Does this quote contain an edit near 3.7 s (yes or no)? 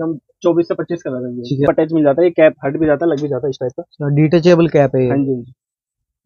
no